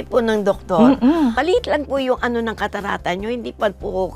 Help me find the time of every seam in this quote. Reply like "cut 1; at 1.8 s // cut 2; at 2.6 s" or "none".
cut 1; at 1.4 s